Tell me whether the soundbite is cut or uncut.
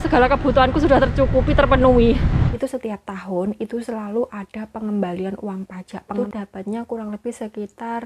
cut